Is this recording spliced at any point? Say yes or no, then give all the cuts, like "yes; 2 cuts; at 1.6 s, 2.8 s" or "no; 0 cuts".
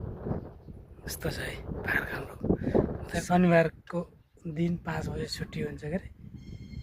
yes; 1 cut; at 3.2 s